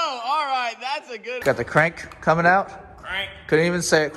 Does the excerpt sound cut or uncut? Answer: cut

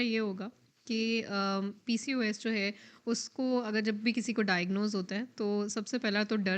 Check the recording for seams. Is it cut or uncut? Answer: uncut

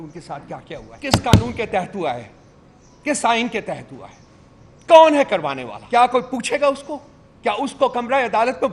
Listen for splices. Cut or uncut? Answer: cut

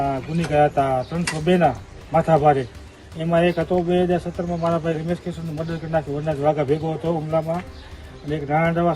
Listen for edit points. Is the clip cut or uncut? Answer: uncut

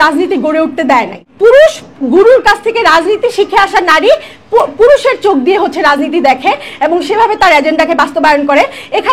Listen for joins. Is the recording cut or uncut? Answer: cut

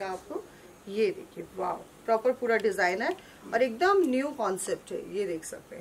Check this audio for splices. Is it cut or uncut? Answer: uncut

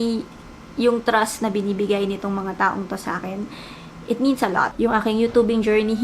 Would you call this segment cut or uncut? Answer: cut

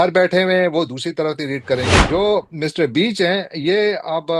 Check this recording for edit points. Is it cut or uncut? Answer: cut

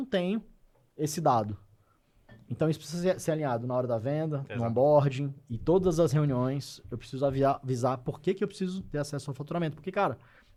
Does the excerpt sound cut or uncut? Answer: uncut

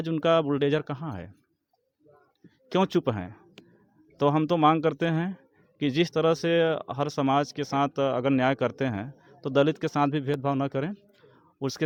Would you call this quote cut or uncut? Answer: uncut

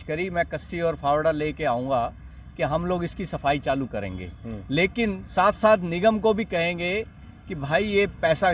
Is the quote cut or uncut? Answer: uncut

